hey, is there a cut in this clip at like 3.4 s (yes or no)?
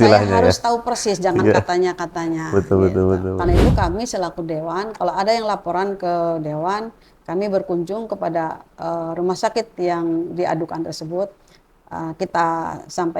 yes